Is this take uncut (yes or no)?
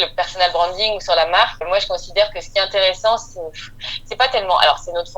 no